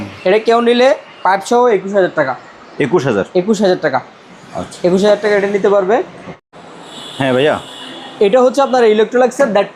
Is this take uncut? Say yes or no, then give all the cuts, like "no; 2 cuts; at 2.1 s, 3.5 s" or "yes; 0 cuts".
yes; 0 cuts